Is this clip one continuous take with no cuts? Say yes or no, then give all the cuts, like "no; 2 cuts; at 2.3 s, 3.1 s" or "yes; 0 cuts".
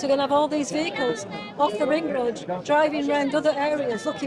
yes; 0 cuts